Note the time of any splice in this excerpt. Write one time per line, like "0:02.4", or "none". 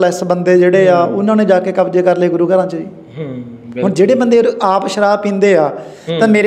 none